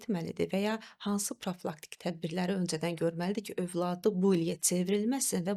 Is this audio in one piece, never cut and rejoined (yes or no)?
yes